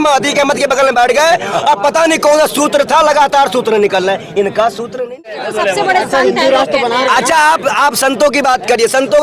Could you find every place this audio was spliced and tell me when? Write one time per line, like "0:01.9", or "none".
0:05.4